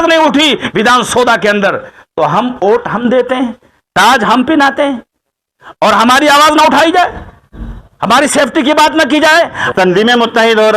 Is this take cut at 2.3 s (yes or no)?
no